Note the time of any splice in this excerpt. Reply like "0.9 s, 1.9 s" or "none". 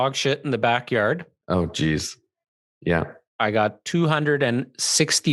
1.3 s, 3.2 s